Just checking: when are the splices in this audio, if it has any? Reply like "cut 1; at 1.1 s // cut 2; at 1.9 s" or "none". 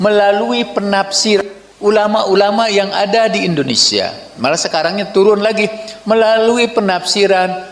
none